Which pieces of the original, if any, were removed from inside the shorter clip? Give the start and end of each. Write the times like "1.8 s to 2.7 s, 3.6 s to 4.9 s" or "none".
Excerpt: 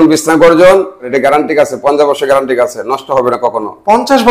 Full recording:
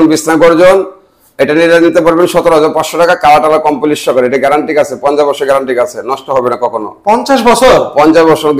1.1 s to 4.3 s